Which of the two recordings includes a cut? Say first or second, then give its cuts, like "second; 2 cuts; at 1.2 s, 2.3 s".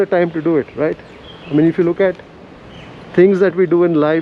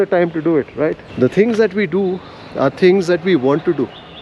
second; 1 cut; at 1.0 s